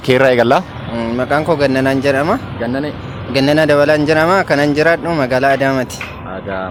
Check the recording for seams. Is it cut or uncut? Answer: uncut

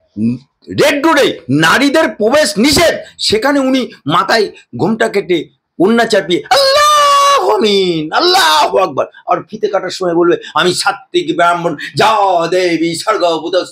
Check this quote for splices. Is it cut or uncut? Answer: uncut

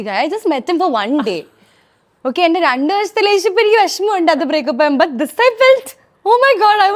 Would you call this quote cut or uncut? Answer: uncut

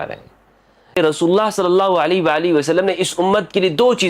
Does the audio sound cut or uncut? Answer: cut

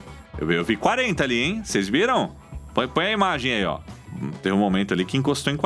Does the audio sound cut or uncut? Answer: uncut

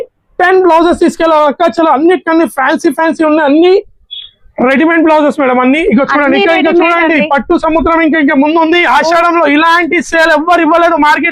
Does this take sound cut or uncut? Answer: uncut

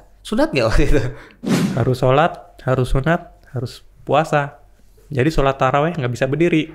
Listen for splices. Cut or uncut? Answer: cut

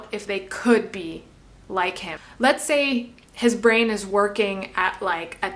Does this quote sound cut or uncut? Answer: cut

